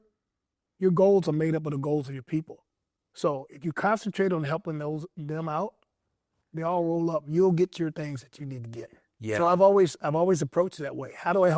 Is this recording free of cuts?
yes; 0 cuts

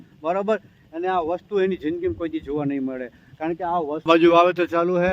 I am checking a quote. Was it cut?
yes; 1 cut; at 4.0 s

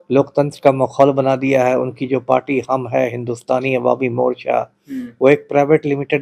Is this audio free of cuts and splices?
yes; 0 cuts

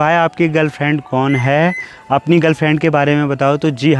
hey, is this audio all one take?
yes; 0 cuts

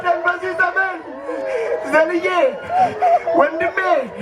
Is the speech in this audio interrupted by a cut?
no; 0 cuts

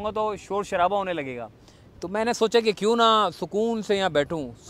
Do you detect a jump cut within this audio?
no; 0 cuts

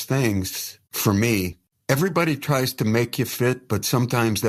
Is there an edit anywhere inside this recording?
no; 0 cuts

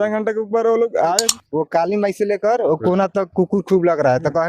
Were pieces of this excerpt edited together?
yes; 1 cut; at 1.4 s

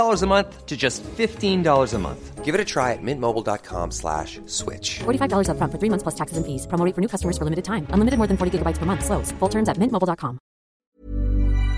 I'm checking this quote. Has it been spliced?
yes; 1 cut; at 10.8 s

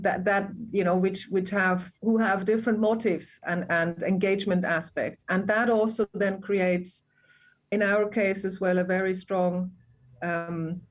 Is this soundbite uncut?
yes; 0 cuts

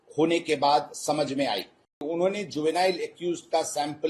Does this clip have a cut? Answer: yes; 1 cut; at 2.1 s

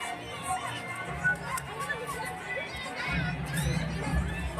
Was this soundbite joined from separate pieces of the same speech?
no; 0 cuts

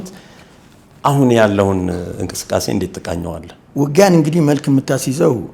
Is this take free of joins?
yes; 0 cuts

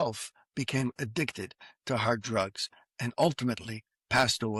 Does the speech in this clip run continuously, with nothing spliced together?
yes; 0 cuts

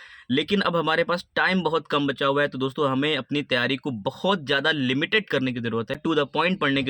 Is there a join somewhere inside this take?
yes; 1 cut; at 6.0 s

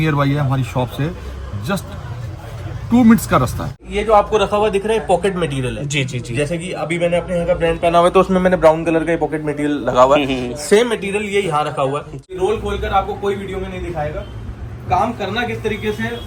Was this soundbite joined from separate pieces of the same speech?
yes; 2 cuts; at 3.8 s, 12.4 s

